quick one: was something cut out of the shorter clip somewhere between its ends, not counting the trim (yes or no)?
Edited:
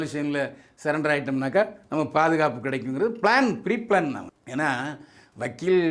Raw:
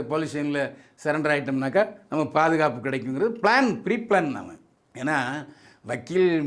yes